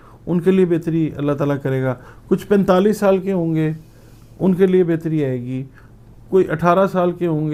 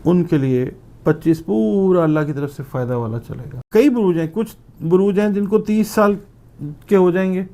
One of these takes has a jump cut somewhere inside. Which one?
second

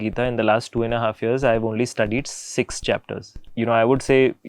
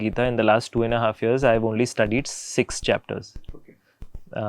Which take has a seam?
first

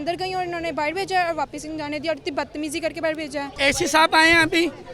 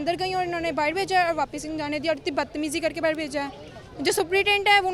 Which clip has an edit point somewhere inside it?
first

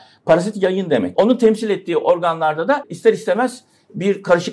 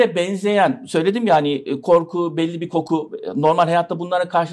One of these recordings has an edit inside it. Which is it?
first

